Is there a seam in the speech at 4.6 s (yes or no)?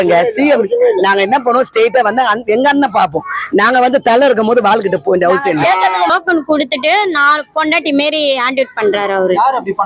no